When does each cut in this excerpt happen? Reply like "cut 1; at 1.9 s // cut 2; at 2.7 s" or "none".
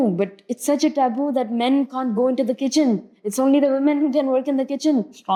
none